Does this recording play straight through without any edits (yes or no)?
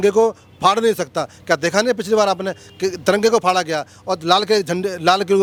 yes